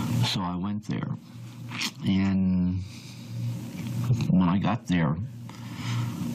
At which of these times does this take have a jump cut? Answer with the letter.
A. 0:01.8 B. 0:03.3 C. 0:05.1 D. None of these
A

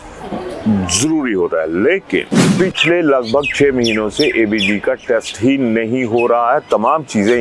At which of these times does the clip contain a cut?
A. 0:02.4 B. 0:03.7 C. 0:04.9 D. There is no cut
A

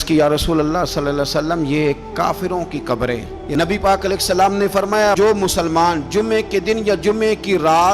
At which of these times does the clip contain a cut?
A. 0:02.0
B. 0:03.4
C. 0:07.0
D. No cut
B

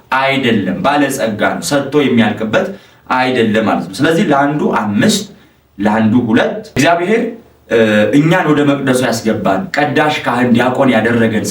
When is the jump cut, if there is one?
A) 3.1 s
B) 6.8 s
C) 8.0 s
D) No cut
B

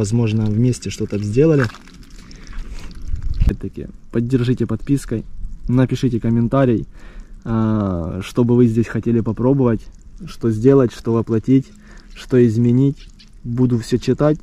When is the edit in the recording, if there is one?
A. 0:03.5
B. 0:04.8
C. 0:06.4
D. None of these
A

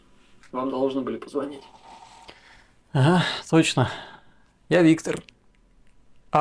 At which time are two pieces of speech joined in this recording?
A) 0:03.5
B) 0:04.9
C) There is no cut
B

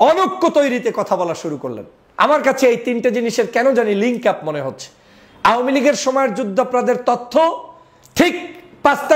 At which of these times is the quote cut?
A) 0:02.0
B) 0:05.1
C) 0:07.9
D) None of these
A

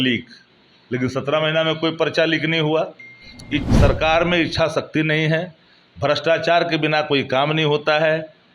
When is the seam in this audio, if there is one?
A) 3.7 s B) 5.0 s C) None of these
A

